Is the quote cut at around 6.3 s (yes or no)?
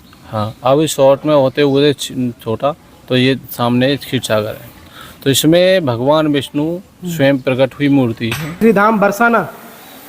no